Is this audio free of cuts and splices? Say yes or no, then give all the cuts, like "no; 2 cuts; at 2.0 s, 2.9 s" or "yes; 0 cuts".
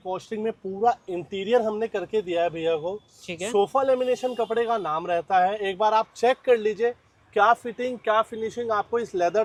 yes; 0 cuts